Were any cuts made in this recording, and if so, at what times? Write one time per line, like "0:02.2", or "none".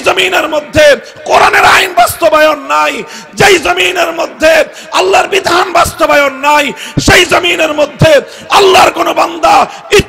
none

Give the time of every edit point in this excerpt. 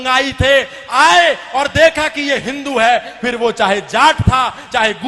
none

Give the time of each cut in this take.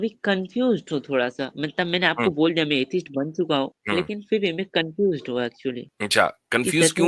0:03.8
0:05.9

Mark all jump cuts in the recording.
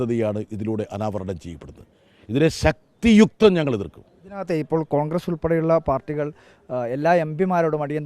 none

